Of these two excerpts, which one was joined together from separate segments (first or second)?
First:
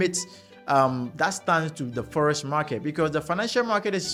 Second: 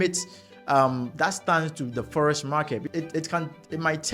second